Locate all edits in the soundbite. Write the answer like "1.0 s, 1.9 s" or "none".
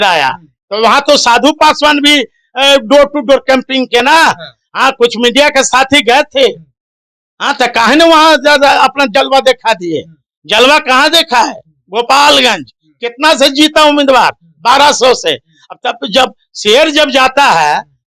none